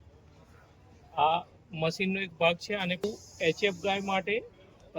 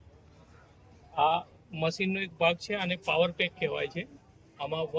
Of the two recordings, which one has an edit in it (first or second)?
first